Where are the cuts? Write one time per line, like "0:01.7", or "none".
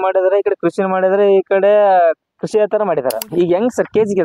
0:03.3